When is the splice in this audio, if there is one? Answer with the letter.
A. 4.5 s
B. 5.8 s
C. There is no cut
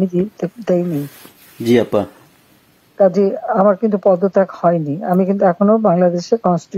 C